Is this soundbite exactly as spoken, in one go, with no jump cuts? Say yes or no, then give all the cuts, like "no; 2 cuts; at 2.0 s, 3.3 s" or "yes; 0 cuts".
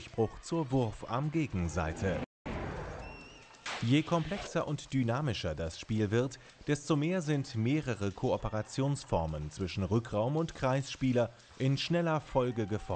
yes; 0 cuts